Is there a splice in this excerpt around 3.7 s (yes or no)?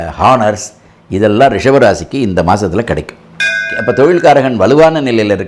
yes